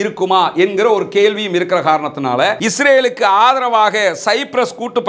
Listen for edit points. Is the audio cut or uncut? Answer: cut